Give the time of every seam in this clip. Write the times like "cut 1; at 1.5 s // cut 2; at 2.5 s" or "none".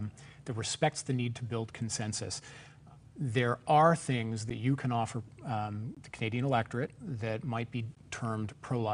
cut 1; at 2.7 s